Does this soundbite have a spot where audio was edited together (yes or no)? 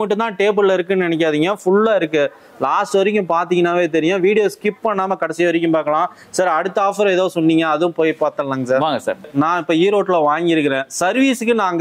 yes